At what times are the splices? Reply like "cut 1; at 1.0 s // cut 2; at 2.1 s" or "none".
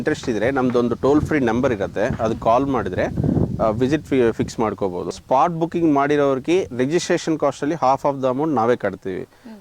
cut 1; at 5.1 s